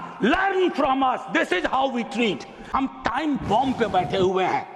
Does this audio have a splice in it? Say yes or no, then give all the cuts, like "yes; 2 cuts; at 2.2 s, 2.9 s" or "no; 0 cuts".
yes; 1 cut; at 2.6 s